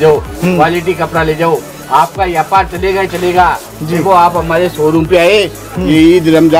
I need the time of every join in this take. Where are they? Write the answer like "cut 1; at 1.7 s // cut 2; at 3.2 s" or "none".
none